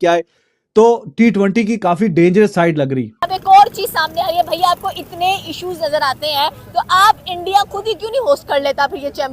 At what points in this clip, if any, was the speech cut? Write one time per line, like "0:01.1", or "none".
0:03.3